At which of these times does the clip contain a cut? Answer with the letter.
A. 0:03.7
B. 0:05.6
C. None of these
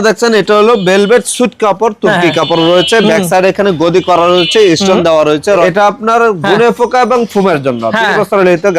B